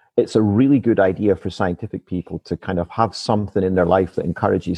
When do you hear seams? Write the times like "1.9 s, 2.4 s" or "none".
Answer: none